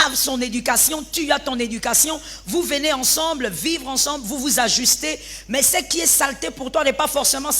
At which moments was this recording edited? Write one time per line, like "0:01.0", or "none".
none